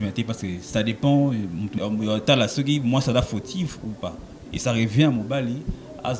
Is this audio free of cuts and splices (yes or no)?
no